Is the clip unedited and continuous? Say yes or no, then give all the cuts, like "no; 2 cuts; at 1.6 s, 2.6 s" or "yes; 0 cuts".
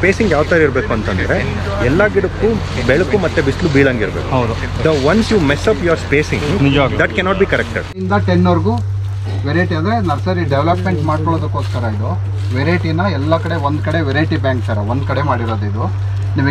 yes; 0 cuts